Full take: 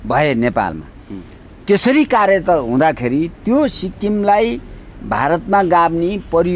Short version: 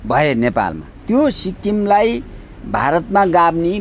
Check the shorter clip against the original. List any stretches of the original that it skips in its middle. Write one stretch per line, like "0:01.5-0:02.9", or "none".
0:01.0-0:03.3